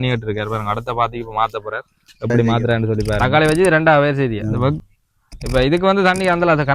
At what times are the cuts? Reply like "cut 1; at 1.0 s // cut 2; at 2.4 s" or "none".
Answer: cut 1; at 3.2 s